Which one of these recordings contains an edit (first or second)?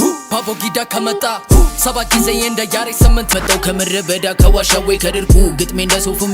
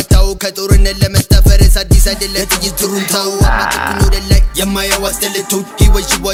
first